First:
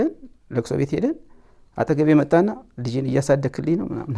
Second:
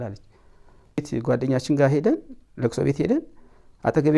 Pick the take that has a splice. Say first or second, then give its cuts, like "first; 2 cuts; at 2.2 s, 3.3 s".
second; 1 cut; at 1.1 s